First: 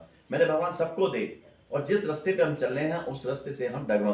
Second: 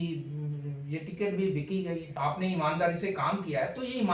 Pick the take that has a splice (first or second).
second